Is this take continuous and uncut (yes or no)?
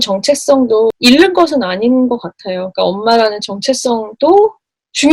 yes